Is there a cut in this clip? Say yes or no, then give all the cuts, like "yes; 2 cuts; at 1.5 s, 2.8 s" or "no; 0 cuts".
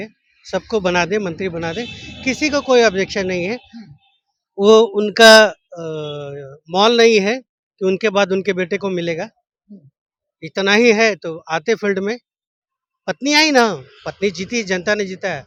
no; 0 cuts